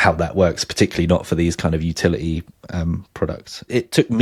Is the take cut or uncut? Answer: uncut